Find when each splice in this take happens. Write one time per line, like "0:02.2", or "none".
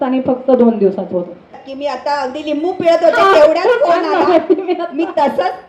0:01.6